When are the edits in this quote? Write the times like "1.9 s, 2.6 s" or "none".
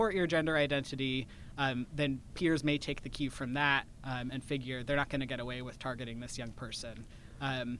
none